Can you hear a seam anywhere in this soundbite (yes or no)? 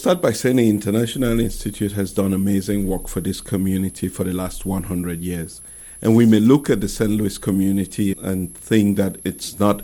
no